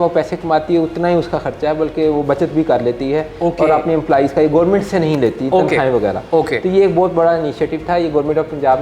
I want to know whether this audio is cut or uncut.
uncut